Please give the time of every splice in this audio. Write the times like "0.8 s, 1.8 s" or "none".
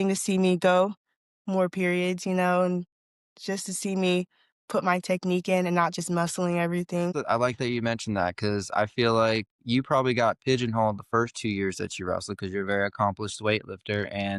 none